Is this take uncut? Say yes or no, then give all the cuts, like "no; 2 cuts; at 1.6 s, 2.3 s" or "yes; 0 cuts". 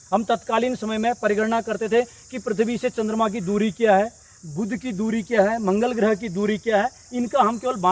yes; 0 cuts